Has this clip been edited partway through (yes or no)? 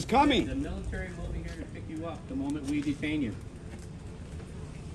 no